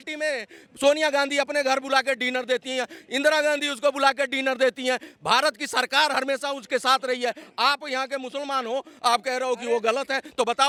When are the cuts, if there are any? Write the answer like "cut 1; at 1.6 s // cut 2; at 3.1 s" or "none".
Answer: none